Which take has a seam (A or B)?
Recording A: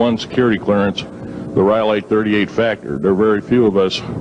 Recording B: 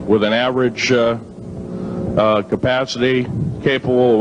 A